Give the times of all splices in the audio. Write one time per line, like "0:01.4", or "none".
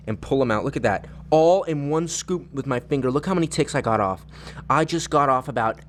none